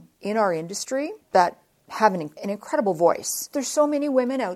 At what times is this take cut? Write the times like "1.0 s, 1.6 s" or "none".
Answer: 1.2 s, 2.3 s, 3.5 s